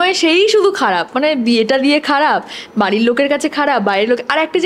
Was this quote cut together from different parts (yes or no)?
no